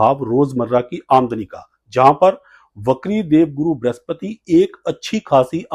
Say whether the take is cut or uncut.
uncut